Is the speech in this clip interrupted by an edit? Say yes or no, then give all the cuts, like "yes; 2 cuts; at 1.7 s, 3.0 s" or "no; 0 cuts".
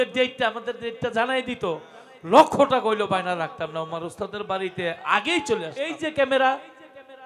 yes; 1 cut; at 5.8 s